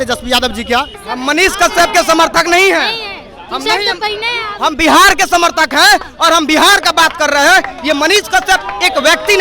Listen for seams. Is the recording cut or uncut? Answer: cut